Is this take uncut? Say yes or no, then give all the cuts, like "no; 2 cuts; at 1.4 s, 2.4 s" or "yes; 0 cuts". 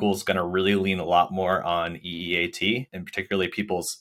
yes; 0 cuts